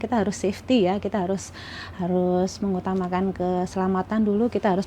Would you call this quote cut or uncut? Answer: uncut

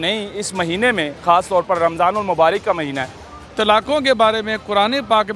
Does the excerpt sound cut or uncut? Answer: cut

